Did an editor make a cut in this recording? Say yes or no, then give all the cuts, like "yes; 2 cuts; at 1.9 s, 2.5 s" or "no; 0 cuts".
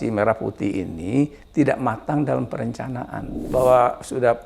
yes; 1 cut; at 3.4 s